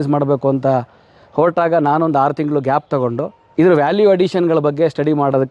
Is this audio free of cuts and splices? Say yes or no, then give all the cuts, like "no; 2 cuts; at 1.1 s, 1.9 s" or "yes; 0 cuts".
no; 1 cut; at 3.4 s